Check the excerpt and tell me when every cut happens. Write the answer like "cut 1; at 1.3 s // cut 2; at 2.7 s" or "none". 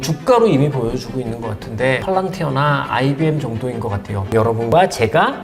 cut 1; at 4.3 s